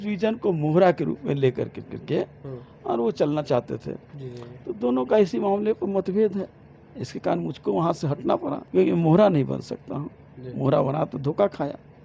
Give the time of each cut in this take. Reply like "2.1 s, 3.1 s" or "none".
8.6 s